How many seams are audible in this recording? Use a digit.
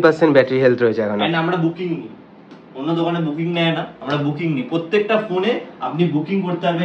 0